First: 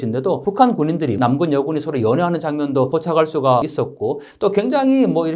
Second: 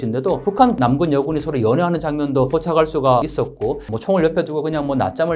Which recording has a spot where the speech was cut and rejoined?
second; 2 cuts; at 0.8 s, 3.9 s

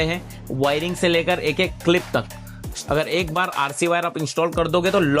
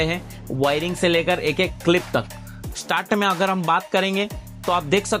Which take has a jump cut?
first; 1 cut; at 2.7 s

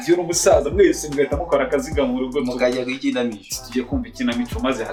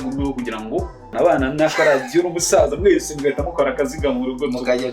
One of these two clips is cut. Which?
second; 1 cut; at 1.1 s

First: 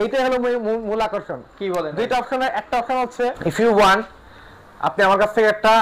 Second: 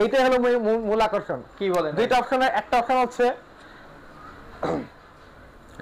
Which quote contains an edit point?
first; 1 cut; at 3.4 s

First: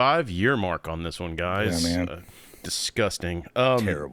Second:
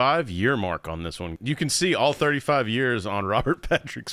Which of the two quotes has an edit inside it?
second; 1 cut; at 1.4 s

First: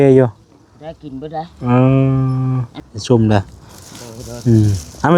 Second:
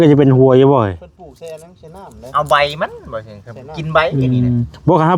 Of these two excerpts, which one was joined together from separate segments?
first; 1 cut; at 2.8 s

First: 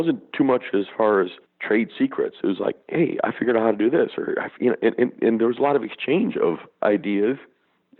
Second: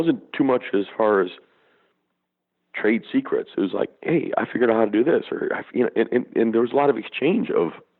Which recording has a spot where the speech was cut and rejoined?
first; 2 cuts; at 1.5 s, 6.7 s

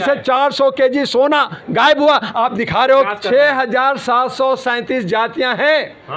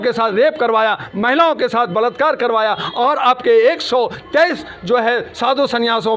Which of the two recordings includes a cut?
first; 1 cut; at 3.1 s

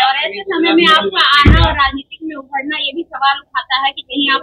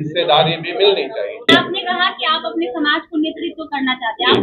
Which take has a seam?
second; 1 cut; at 1.5 s

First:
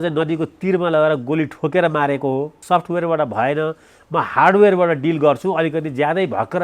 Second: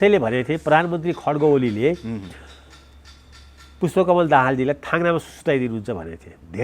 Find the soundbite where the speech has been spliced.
first; 1 cut; at 2.6 s

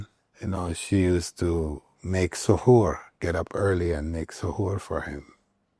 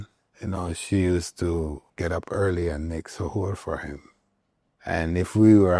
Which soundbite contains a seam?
second; 1 cut; at 1.9 s

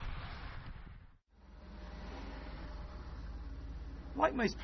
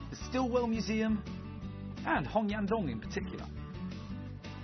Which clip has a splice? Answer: second; 1 cut; at 3.0 s

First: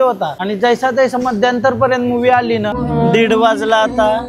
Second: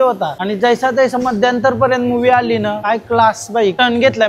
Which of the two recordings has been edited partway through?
first; 1 cut; at 2.8 s

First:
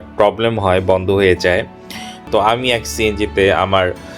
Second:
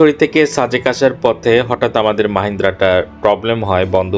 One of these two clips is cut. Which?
first; 1 cut; at 2.1 s

